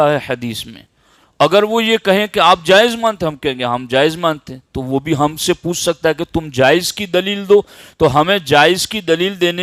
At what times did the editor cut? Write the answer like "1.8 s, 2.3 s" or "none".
none

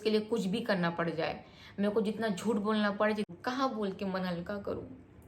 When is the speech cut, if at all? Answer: 3.3 s

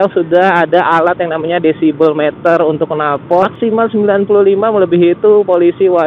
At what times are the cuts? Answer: 3.5 s

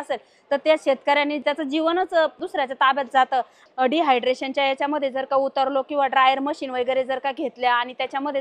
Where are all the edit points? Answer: 1.4 s, 2.4 s, 3.6 s

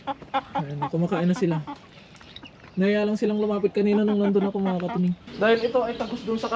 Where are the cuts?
5.2 s

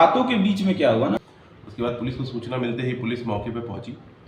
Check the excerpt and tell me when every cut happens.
1.2 s

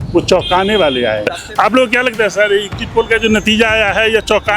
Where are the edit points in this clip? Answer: 1.3 s

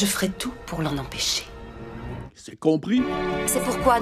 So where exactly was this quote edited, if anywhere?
3.1 s

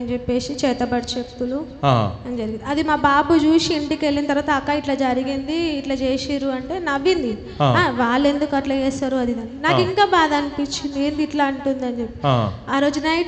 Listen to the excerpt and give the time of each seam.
none

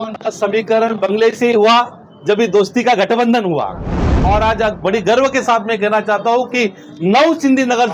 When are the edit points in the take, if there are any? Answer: 4.1 s

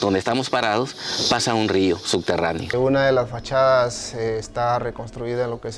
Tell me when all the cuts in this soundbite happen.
2.7 s

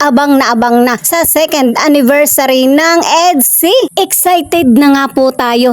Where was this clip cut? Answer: 1.0 s

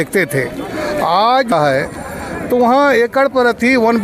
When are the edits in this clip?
1.5 s

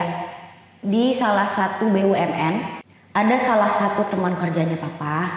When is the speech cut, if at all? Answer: 2.7 s

